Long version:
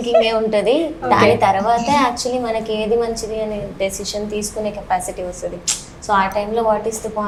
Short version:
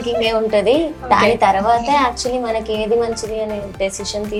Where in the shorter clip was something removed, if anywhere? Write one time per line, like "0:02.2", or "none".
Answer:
none

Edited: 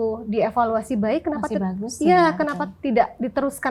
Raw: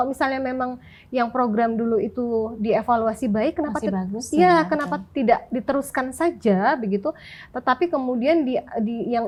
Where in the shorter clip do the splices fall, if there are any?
none

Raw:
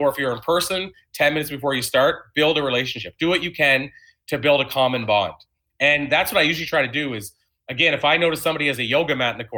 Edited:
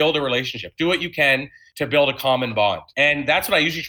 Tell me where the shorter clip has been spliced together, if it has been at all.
0:01.6
0:02.9

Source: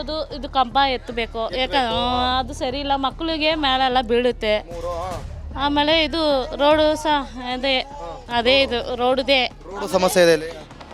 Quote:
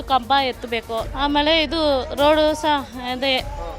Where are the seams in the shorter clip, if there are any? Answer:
0:01.0

